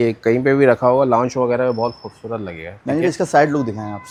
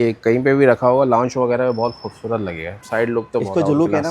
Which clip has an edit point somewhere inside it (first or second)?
second